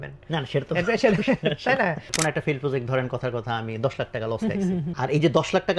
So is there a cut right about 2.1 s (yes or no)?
yes